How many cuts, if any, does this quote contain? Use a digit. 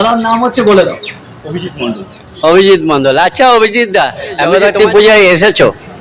1